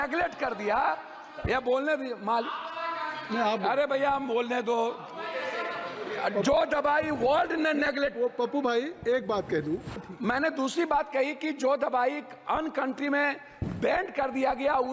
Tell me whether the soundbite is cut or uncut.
cut